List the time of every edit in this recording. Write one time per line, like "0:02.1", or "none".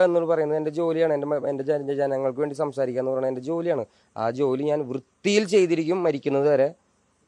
none